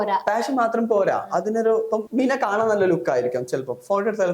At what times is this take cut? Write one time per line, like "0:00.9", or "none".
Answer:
0:02.1